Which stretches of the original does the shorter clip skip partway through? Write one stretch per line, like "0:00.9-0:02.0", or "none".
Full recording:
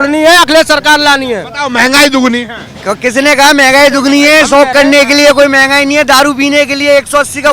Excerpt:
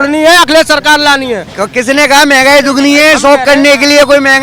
0:01.4-0:02.7